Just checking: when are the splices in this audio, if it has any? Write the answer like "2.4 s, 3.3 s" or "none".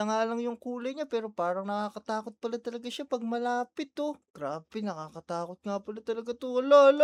none